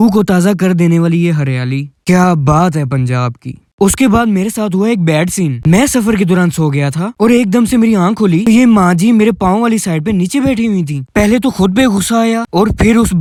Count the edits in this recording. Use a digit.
0